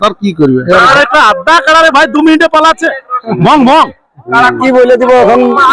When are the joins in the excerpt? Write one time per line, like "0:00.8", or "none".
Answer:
0:00.9
0:04.6

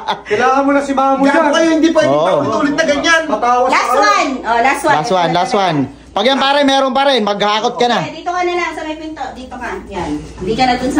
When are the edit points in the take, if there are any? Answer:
none

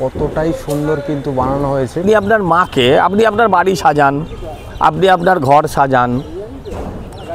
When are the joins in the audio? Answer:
0:02.0

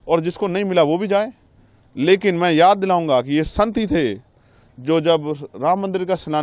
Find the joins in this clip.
none

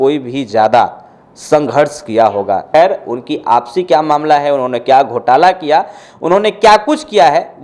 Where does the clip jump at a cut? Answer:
0:02.6

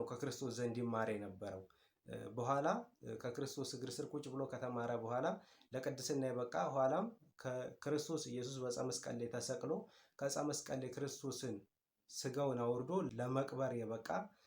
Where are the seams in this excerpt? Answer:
0:13.1

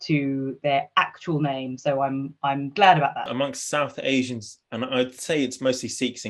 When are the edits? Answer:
0:03.3

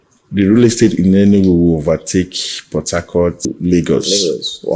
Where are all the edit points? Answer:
0:03.5

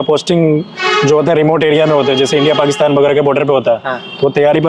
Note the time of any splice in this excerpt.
none

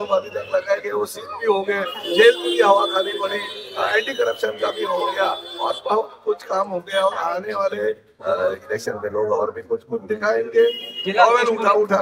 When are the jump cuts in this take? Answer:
none

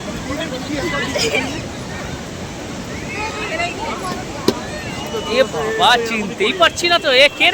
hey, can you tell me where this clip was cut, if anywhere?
none

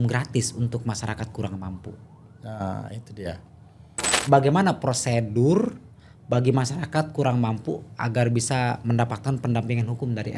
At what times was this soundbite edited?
0:04.1

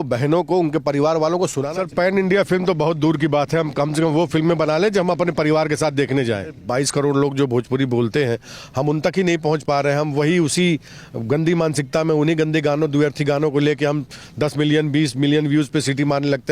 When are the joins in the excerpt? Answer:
0:01.6
0:06.6

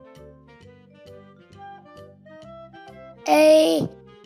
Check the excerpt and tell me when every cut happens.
none

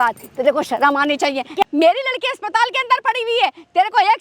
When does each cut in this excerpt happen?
0:01.6

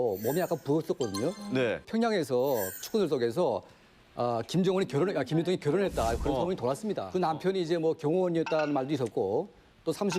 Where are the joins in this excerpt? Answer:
0:01.9
0:07.0

